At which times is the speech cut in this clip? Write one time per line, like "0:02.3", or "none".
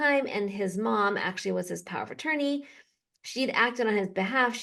none